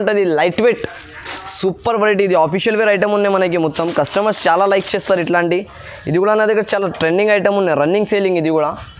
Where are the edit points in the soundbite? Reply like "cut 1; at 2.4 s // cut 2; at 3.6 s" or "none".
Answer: none